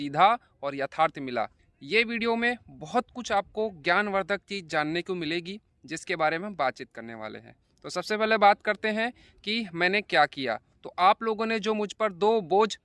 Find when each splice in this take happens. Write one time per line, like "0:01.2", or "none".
none